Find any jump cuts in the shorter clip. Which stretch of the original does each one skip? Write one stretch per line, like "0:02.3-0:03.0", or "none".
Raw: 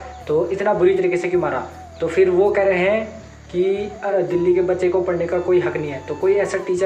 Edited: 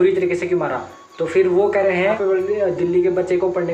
0:03.2-0:03.9